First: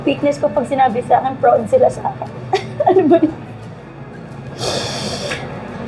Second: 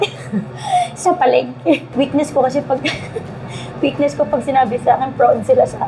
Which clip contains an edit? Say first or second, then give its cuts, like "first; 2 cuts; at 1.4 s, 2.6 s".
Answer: second; 1 cut; at 1.9 s